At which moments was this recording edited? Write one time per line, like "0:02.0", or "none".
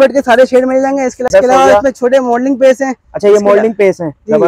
0:01.3